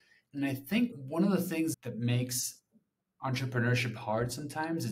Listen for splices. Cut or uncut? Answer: cut